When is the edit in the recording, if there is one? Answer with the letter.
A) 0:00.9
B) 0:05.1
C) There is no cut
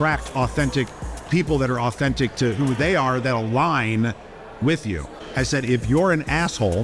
B